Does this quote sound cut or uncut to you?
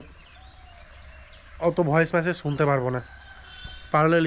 uncut